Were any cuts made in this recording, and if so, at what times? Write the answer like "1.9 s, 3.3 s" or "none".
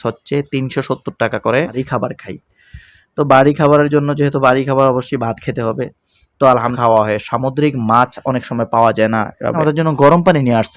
1.7 s, 6.7 s, 9.6 s